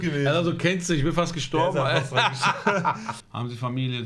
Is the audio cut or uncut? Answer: cut